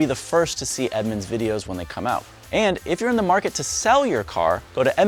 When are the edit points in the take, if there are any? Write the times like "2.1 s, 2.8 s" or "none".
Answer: none